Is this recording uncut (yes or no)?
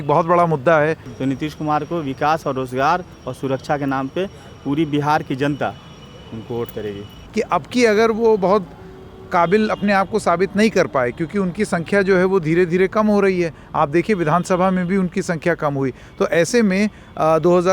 no